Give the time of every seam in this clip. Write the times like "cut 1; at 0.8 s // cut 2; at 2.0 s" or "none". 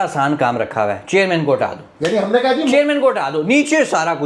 none